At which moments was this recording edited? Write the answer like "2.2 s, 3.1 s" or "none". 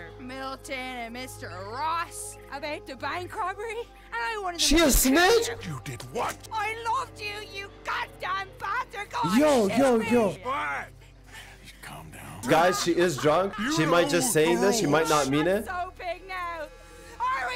6.4 s, 10.4 s, 12.4 s, 13.6 s